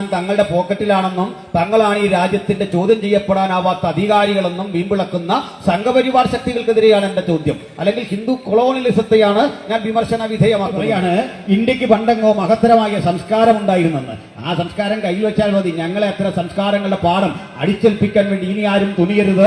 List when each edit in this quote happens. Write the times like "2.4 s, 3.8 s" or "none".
10.8 s